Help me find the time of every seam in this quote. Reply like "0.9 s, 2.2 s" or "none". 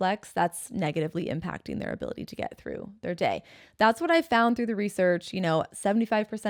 none